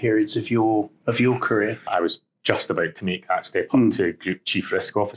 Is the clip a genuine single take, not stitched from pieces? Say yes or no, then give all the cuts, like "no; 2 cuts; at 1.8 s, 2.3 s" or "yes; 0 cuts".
no; 1 cut; at 1.9 s